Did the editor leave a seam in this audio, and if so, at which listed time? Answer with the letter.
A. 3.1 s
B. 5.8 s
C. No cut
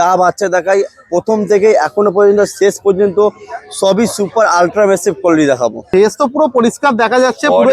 B